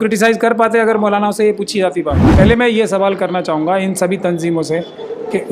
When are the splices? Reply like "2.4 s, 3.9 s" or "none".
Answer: 2.2 s